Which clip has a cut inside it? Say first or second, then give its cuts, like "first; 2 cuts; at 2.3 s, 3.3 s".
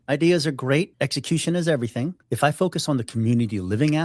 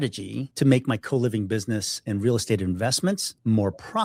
first; 1 cut; at 2.2 s